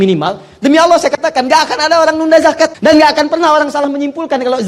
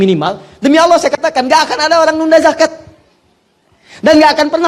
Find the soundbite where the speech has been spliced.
first; 1 cut; at 2.8 s

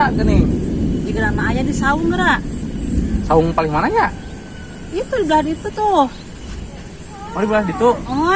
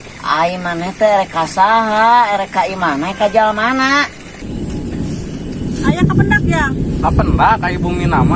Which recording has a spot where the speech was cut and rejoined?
second; 1 cut; at 4.4 s

